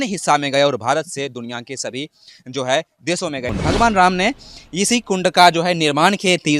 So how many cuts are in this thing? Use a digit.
1